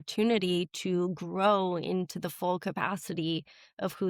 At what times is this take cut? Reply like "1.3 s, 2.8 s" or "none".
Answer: none